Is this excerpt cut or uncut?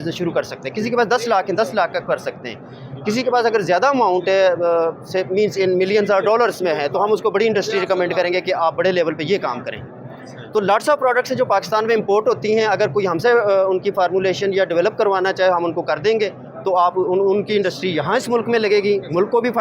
uncut